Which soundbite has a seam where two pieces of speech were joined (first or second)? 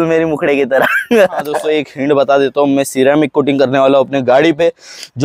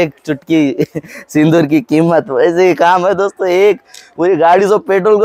first